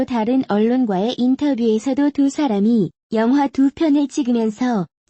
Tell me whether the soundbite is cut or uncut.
uncut